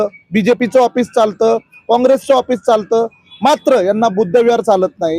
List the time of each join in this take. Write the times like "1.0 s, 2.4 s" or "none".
none